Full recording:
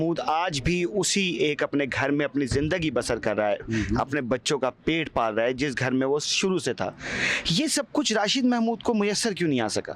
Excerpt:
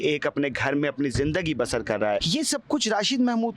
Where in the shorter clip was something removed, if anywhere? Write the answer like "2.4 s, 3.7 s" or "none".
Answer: 2.3 s

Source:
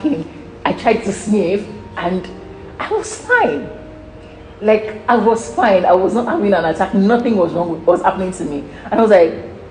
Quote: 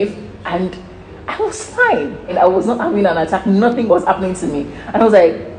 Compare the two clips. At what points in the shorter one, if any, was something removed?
2.3 s, 3.8 s

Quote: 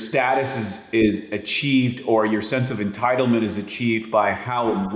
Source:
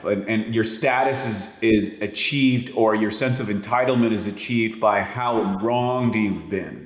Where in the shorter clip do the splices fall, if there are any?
none

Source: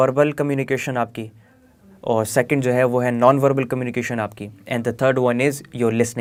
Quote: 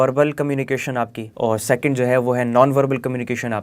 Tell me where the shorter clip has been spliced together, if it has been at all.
1.2 s

